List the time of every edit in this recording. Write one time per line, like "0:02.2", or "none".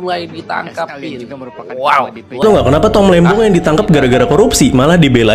0:02.4

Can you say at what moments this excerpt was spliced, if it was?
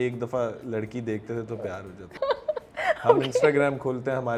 0:02.1

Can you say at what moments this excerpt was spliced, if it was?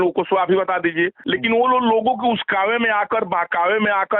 0:01.2

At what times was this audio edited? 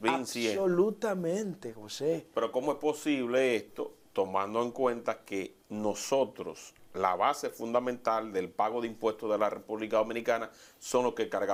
none

